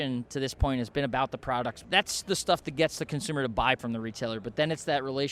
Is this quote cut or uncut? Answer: cut